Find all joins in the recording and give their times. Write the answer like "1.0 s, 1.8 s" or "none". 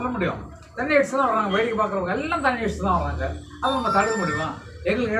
none

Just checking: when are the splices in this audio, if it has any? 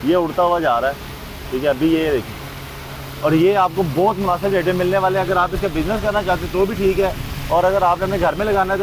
none

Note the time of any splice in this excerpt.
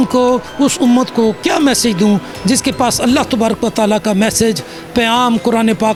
none

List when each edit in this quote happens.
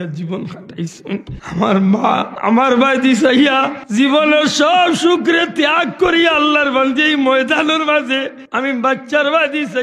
1.4 s, 2.3 s, 3.8 s, 8.4 s

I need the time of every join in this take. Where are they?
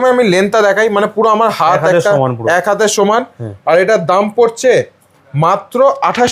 none

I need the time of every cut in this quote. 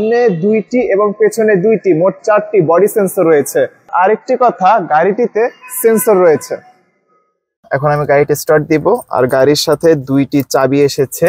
3.9 s, 7.6 s

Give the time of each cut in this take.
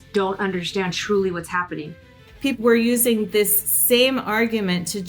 2.6 s

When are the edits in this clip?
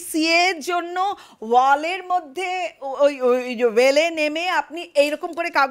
none

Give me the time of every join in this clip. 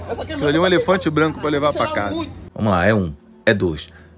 2.4 s

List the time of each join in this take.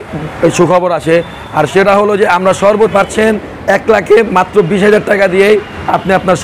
2.9 s

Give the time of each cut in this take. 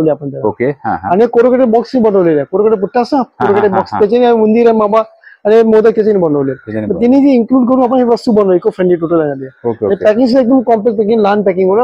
none

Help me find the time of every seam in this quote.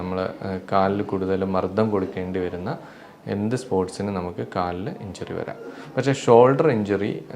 none

